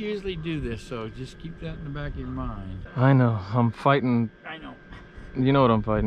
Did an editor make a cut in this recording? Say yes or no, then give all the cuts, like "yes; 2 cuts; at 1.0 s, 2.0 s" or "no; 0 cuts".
yes; 1 cut; at 2.8 s